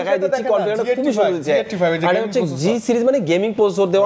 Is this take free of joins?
yes; 0 cuts

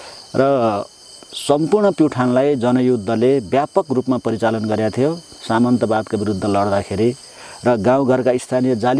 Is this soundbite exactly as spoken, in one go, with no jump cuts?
no; 1 cut; at 5.3 s

